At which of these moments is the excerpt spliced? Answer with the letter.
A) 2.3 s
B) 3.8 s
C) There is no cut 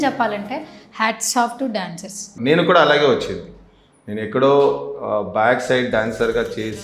A